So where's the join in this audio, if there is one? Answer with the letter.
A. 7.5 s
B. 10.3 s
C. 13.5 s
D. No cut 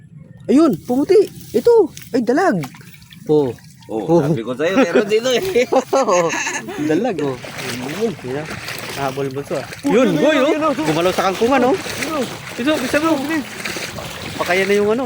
A